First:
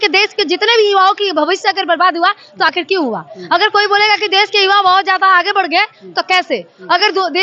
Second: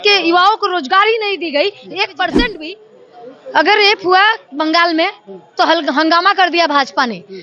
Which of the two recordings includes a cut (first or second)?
second